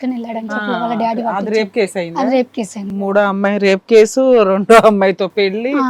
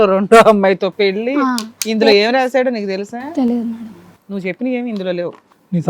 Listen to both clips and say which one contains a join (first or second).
first